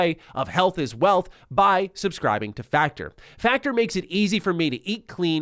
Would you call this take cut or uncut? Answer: uncut